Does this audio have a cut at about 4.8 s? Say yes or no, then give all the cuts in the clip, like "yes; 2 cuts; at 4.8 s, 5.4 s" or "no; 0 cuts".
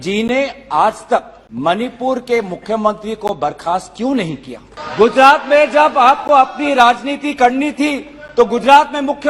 yes; 2 cuts; at 1.4 s, 4.8 s